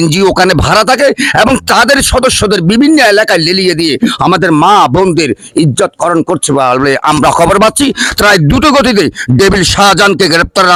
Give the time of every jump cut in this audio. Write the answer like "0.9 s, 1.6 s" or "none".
none